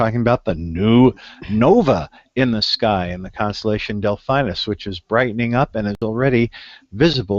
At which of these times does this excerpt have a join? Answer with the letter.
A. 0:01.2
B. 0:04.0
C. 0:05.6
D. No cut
B